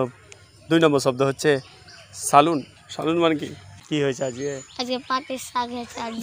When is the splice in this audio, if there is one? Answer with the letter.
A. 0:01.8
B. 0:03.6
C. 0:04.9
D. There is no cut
B